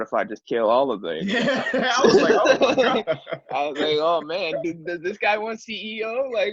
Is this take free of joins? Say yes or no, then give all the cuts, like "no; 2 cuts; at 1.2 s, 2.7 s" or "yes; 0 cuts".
yes; 0 cuts